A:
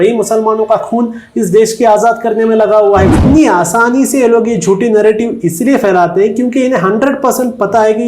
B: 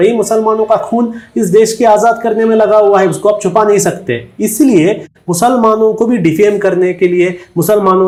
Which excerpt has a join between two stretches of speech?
A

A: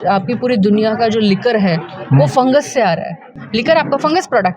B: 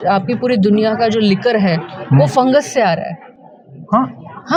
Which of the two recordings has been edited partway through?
A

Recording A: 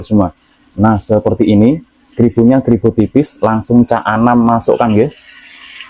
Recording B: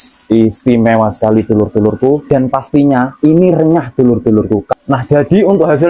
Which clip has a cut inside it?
B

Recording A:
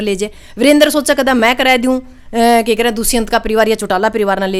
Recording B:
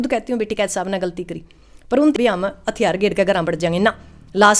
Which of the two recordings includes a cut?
B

